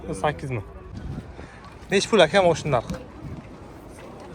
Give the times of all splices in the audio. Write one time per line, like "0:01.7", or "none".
0:01.0